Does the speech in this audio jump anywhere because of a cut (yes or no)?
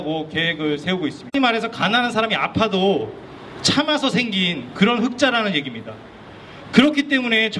no